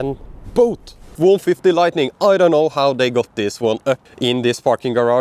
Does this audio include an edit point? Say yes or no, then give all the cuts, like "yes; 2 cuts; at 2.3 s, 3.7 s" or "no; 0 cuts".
yes; 2 cuts; at 1.0 s, 4.1 s